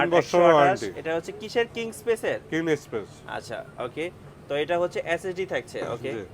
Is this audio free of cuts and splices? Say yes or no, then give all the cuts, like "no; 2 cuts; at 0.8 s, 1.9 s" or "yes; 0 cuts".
yes; 0 cuts